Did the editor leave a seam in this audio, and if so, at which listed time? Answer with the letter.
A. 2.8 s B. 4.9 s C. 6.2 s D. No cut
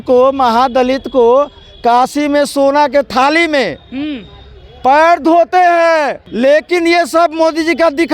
C